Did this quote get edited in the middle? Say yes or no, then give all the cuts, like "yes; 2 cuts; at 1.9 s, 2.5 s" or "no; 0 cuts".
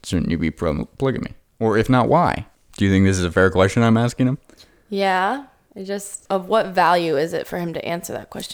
yes; 1 cut; at 6.1 s